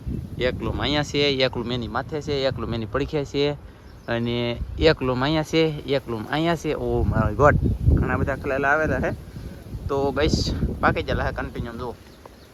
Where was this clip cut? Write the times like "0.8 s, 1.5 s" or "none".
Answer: none